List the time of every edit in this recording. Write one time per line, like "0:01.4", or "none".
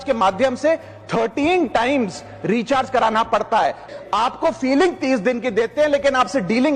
0:03.9